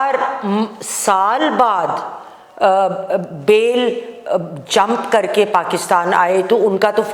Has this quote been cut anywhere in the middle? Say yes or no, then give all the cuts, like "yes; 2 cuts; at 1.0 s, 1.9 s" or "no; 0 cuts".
no; 0 cuts